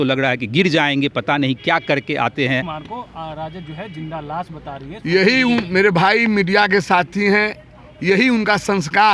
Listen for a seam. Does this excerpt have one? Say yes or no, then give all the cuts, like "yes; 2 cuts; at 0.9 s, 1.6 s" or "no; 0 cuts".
yes; 1 cut; at 2.8 s